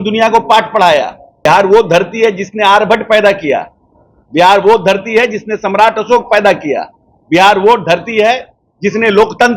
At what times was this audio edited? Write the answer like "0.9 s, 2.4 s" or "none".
1.4 s